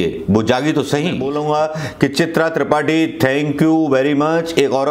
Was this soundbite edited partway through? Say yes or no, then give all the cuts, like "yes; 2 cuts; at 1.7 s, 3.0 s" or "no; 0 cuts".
yes; 1 cut; at 1.2 s